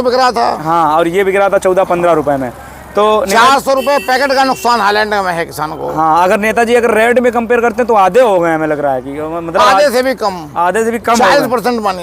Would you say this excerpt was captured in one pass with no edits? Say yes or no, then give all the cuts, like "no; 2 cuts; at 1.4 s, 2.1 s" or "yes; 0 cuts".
yes; 0 cuts